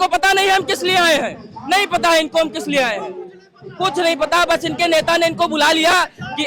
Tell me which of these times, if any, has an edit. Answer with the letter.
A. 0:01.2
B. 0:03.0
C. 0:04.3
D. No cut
D